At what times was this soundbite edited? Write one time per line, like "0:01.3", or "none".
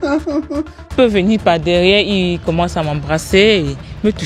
0:00.9